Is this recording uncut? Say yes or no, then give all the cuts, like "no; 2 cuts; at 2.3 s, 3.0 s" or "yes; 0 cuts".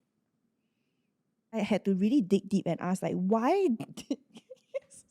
no; 1 cut; at 1.6 s